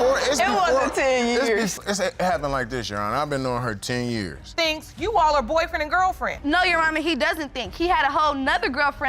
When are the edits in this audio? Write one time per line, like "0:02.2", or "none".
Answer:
0:04.6